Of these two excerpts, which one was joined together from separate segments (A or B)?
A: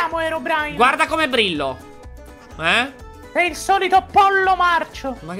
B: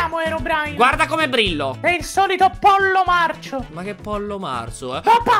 B